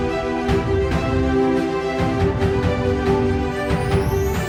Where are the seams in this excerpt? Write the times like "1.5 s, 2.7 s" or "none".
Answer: none